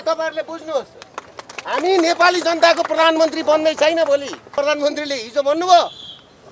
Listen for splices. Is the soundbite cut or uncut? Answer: cut